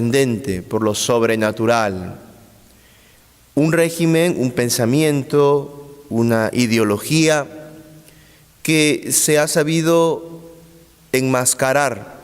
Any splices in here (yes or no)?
yes